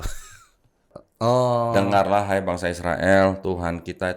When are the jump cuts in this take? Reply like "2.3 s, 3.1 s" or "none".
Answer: 1.0 s